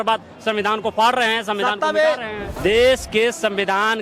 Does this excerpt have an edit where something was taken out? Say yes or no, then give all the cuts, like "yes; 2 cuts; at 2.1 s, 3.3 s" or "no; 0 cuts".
yes; 1 cut; at 2.4 s